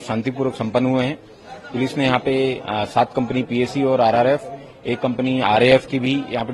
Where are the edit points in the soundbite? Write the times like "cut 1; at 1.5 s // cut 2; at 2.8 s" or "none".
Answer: none